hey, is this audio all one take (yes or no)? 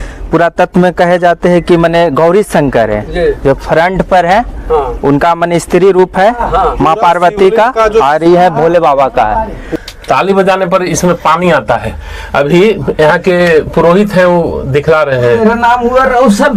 no